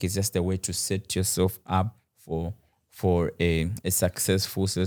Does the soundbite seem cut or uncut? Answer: uncut